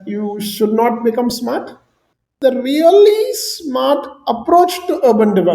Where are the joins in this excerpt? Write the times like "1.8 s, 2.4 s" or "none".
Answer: 2.3 s